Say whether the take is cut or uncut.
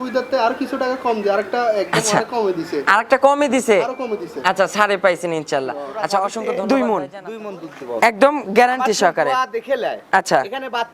cut